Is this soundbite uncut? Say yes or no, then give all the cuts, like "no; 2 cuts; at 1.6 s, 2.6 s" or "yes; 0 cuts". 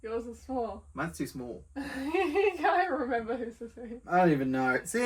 yes; 0 cuts